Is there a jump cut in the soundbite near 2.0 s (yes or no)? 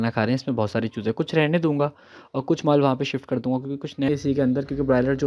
no